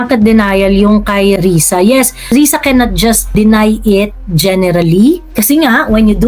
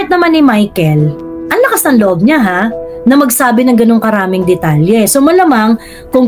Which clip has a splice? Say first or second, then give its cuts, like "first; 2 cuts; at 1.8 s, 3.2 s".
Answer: first; 4 cuts; at 1.4 s, 2.3 s, 3.3 s, 5.3 s